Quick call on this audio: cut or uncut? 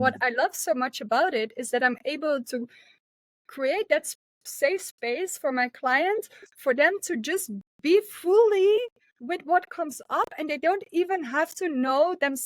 uncut